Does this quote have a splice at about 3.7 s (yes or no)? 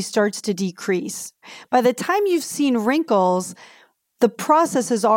no